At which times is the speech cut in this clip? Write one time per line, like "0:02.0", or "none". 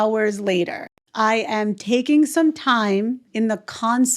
0:01.0
0:03.2